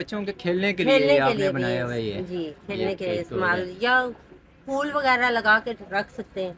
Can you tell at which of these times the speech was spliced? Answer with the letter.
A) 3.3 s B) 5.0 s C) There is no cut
C